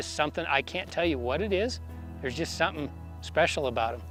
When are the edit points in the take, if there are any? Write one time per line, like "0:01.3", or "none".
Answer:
none